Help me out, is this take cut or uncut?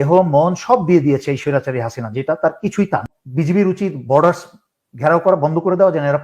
cut